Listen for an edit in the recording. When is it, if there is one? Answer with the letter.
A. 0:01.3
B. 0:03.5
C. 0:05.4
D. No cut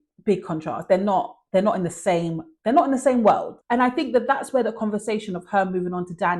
B